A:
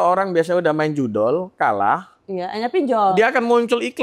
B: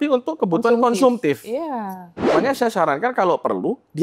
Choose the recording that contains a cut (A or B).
B